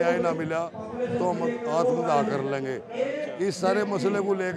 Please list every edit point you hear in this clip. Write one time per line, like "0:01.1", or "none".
none